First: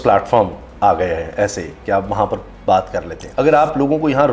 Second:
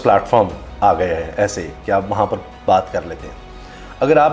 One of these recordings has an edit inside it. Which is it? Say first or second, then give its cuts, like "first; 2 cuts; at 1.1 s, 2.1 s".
first; 1 cut; at 3.2 s